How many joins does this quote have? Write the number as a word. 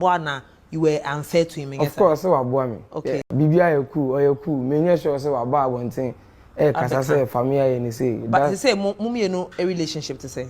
one